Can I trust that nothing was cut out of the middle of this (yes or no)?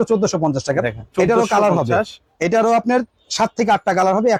yes